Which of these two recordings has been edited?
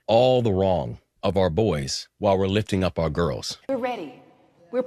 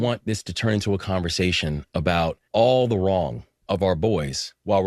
first; 1 cut; at 3.5 s

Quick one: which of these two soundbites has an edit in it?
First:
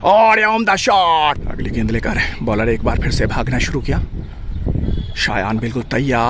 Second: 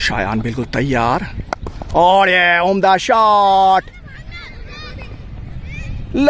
first; 1 cut; at 1.4 s

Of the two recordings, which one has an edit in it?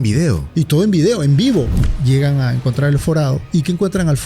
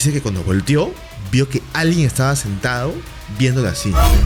first; 2 cuts; at 1.7 s, 3.4 s

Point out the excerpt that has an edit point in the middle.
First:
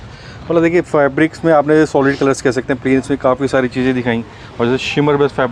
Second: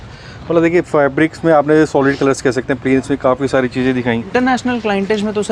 second; 1 cut; at 4.3 s

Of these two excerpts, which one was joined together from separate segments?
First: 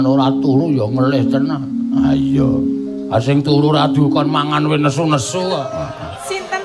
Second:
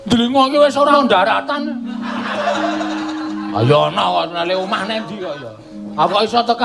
second; 1 cut; at 0.9 s

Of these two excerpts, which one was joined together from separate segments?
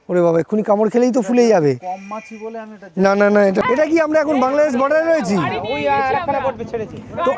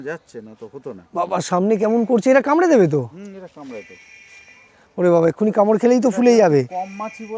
first; 1 cut; at 3.6 s

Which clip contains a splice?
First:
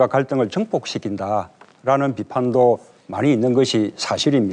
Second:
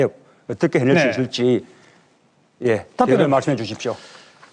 first; 1 cut; at 2.0 s

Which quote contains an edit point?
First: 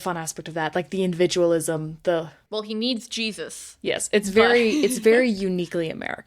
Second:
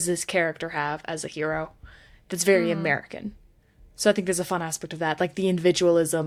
first; 1 cut; at 2.8 s

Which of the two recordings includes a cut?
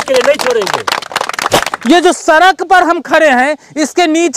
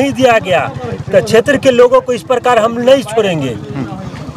first; 1 cut; at 1.7 s

